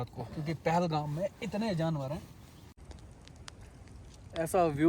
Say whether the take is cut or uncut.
cut